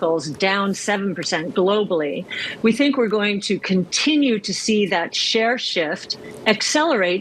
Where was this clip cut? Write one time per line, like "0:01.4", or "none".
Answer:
none